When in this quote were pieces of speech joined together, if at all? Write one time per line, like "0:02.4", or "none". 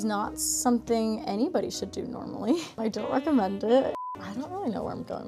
0:04.0

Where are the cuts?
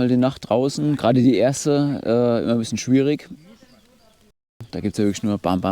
0:04.7

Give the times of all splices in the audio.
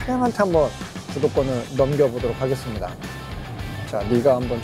none

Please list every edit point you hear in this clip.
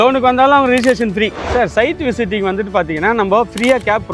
0:01.4

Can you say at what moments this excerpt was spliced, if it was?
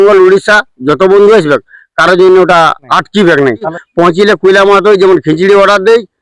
0:02.8
0:03.8

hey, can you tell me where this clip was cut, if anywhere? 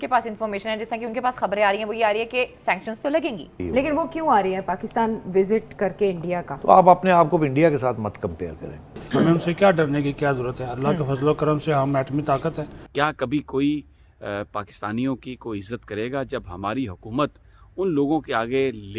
0:03.6
0:06.5
0:09.0
0:12.7

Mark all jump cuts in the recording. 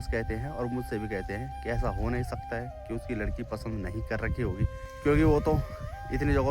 0:04.8

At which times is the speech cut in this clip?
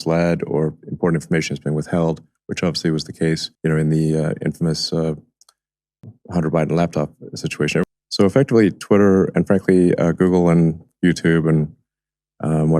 0:07.8

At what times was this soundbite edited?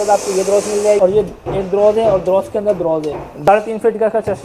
0:01.0
0:03.5

